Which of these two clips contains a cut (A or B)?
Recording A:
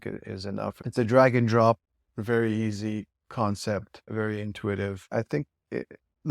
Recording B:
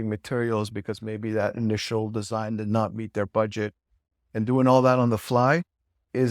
A